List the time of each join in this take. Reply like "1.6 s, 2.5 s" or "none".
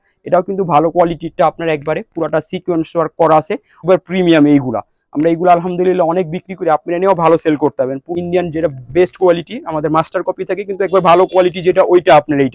3.8 s, 8.1 s